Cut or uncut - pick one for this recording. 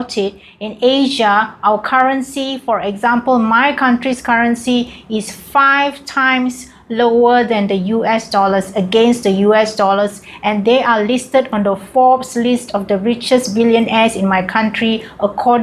uncut